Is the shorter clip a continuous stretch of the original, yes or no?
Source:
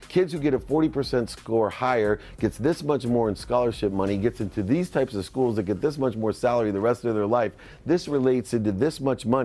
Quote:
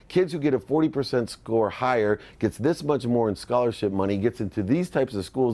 yes